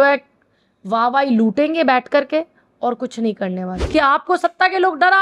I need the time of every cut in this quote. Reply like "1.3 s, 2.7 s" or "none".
3.7 s